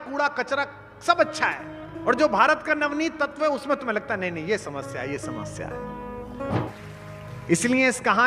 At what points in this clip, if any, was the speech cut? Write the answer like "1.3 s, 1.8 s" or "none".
6.7 s